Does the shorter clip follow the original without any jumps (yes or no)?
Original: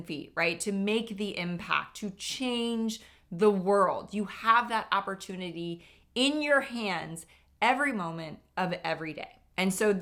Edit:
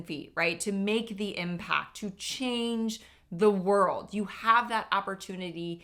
yes